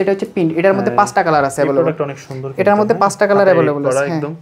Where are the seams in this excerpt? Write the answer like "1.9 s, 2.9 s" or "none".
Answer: none